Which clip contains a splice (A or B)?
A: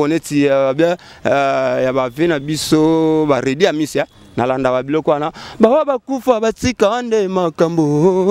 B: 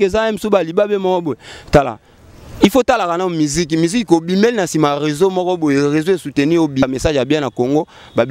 B